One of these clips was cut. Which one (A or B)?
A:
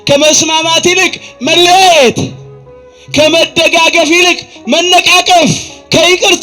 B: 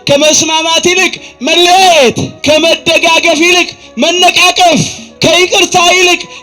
B